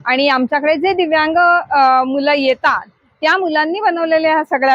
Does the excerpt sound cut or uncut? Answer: uncut